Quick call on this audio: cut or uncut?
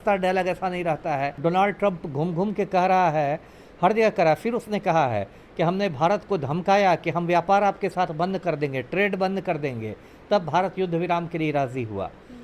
cut